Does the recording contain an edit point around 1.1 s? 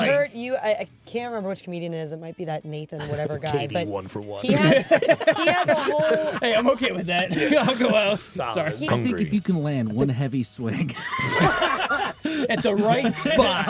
no; 1 cut; at 8.9 s

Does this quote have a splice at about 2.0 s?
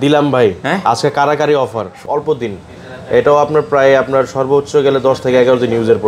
yes; 1 cut; at 2.0 s

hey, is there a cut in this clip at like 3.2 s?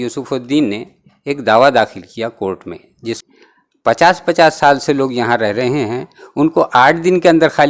yes; 1 cut; at 3.2 s

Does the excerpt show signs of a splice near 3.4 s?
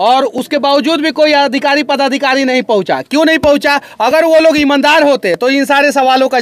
no; 0 cuts

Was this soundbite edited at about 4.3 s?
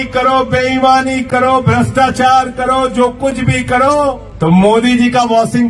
yes; 1 cut; at 4.3 s

